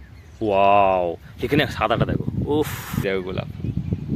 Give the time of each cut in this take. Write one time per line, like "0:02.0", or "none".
0:03.0